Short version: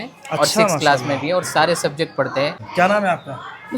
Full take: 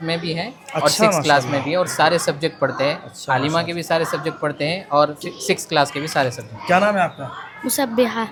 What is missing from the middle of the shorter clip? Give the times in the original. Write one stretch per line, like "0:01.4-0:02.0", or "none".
0:03.0-0:06.5